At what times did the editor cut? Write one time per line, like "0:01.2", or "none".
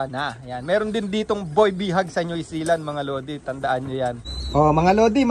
0:04.3